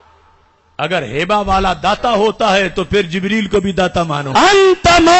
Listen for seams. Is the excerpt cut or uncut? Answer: cut